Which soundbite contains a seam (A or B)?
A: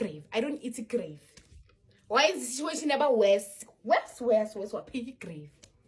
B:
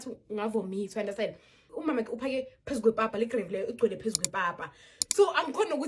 B